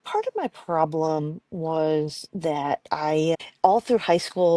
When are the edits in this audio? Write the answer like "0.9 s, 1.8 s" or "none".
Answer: 3.4 s